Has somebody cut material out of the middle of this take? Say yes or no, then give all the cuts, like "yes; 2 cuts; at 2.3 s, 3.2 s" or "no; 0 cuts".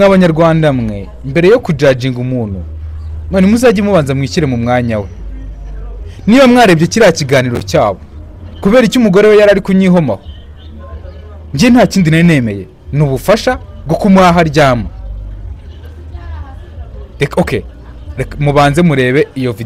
no; 0 cuts